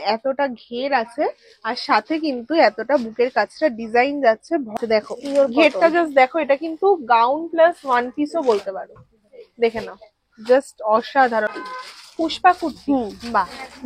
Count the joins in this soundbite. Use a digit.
2